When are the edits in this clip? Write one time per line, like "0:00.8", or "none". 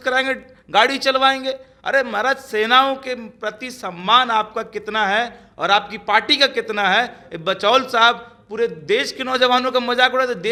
none